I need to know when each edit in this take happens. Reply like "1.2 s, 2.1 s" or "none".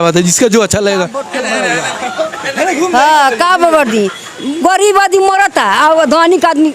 1.2 s